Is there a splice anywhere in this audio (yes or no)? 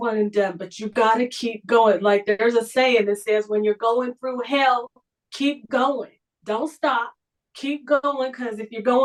no